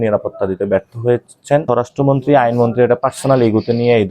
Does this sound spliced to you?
yes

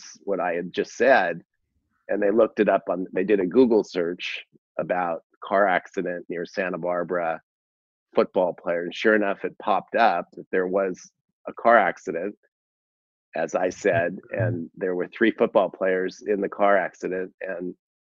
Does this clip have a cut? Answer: no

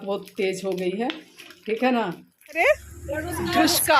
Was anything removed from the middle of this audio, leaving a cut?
yes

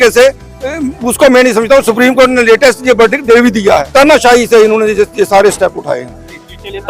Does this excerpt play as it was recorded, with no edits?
no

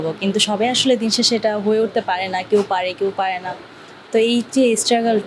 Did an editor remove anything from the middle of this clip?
no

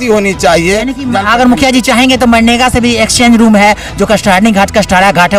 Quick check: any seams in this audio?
no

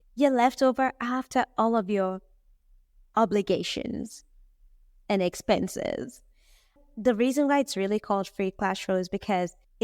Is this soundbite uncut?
no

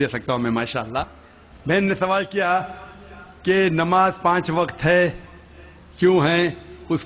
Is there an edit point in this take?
yes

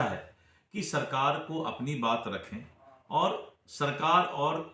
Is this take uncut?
yes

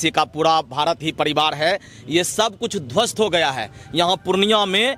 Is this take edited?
no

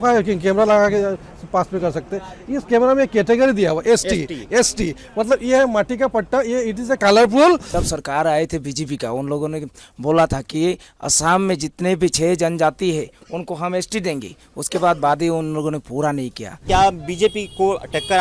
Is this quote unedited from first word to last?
no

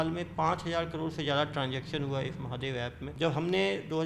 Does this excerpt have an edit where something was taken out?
yes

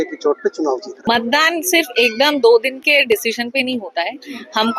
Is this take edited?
yes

